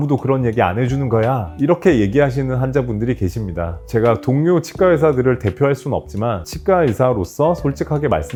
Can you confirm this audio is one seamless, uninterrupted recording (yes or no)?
yes